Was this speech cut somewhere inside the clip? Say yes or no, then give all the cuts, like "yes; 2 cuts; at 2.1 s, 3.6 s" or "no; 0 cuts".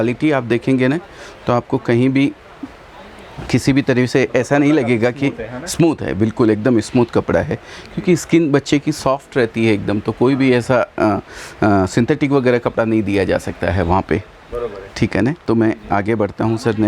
no; 0 cuts